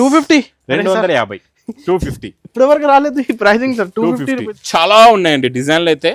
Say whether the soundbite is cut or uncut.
cut